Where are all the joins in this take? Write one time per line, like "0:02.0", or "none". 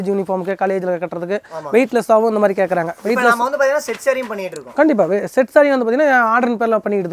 none